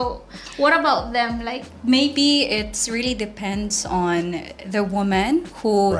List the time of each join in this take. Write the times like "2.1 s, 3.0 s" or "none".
1.7 s